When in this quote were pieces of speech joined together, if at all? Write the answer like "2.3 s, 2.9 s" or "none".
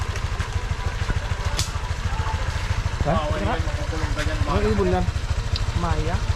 none